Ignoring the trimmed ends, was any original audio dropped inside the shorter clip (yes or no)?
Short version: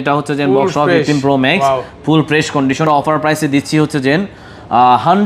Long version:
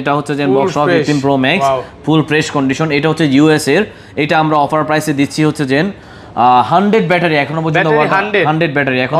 yes